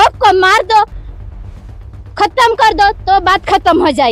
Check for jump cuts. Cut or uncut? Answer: uncut